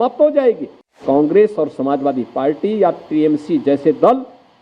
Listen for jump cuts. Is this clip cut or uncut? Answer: cut